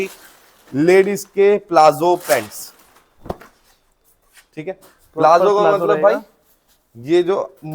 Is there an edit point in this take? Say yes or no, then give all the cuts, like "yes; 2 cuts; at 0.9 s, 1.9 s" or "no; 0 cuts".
no; 0 cuts